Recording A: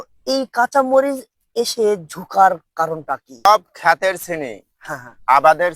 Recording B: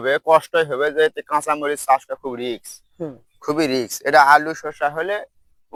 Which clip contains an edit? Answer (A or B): A